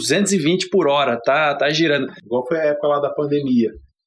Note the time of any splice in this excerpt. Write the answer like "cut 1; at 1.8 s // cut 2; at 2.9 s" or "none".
cut 1; at 2.2 s